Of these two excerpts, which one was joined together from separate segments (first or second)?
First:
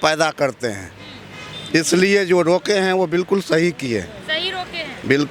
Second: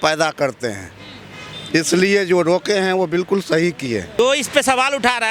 second